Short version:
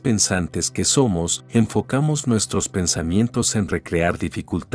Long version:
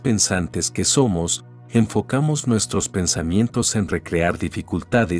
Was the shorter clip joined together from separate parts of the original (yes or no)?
yes